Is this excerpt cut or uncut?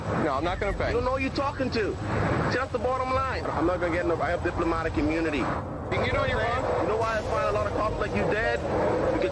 uncut